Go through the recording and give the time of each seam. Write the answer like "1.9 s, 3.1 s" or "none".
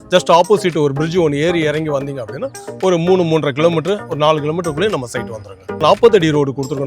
5.8 s